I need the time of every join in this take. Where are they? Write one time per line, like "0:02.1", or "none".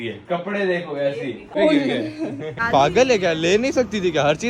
0:01.5
0:02.5